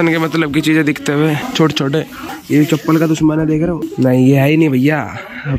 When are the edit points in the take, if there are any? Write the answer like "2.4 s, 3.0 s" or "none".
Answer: 1.5 s, 2.3 s, 3.8 s

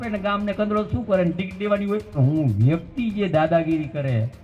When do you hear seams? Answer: 2.2 s

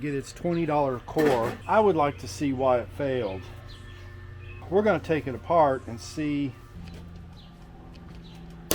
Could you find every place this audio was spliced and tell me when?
4.6 s, 6.7 s

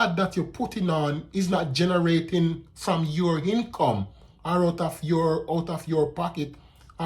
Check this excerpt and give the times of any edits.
none

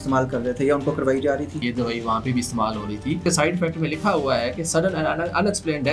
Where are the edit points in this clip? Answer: 1.6 s, 3.2 s

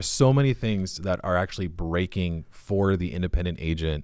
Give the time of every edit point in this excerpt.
none

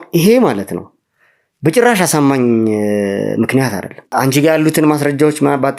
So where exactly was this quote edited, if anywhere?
3.9 s

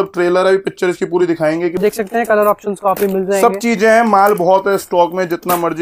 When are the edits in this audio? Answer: 1.8 s

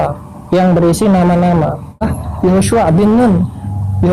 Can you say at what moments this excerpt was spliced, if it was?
2.1 s

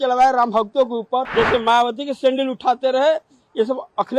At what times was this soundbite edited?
1.3 s

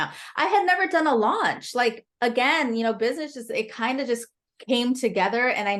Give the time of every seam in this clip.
none

